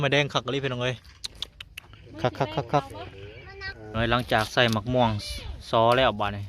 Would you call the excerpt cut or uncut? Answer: cut